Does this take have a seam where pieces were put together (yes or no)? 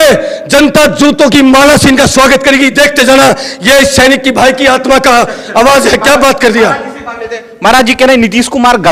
no